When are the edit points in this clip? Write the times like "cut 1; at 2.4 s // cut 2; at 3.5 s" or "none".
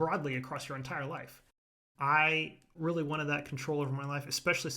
cut 1; at 1.7 s // cut 2; at 2.7 s